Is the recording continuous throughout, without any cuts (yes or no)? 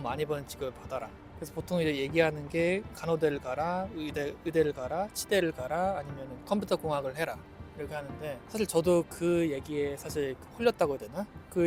yes